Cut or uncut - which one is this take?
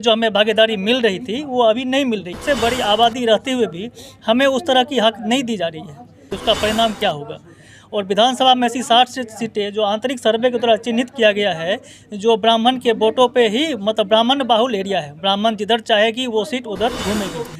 cut